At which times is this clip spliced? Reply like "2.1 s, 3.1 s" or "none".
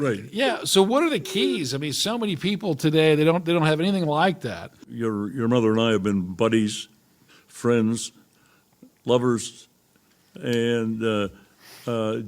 4.8 s